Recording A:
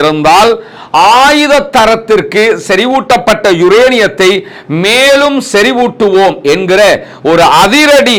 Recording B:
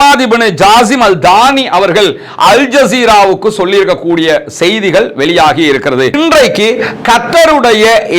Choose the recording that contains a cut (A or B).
B